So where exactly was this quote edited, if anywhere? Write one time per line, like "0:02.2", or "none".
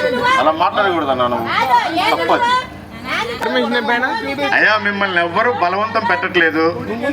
0:03.4